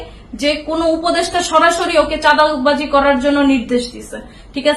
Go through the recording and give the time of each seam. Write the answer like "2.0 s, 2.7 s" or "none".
none